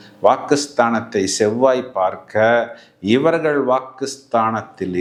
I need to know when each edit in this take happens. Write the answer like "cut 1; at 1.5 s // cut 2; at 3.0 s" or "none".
none